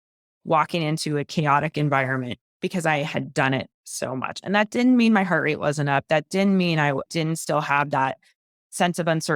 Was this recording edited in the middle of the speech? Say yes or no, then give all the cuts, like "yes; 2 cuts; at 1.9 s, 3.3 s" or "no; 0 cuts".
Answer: yes; 2 cuts; at 2.4 s, 7.1 s